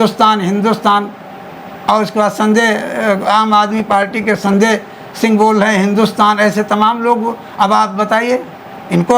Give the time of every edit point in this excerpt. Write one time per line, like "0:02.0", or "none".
none